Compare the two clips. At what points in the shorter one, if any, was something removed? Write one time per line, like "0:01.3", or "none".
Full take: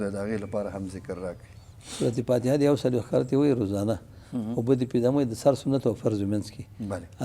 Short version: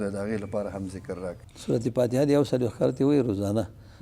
0:01.5